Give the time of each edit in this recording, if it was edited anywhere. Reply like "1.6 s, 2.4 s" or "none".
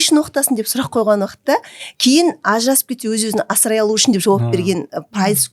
none

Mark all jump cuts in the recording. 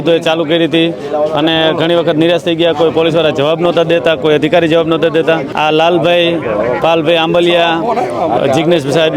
5.5 s

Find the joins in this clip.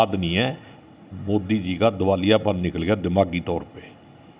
none

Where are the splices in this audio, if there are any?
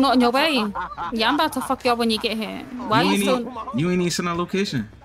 none

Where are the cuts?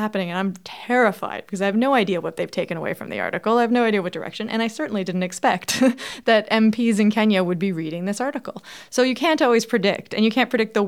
none

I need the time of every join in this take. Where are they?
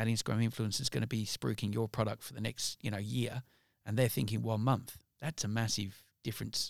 none

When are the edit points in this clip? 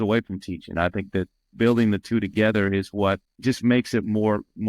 3.3 s

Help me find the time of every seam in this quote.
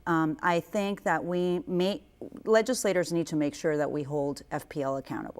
1.1 s

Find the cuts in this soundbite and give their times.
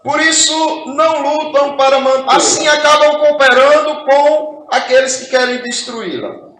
2.2 s

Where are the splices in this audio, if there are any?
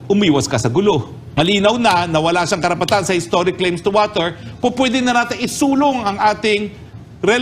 1.2 s

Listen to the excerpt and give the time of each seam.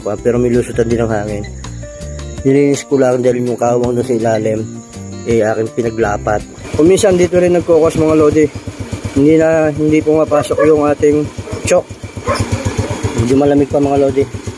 6.6 s, 12.4 s

